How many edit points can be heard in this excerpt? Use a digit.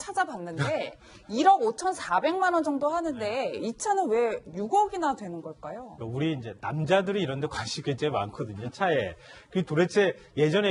1